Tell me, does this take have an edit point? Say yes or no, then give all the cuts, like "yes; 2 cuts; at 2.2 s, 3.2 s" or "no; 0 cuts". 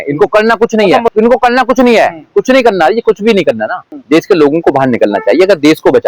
yes; 2 cuts; at 1.1 s, 3.9 s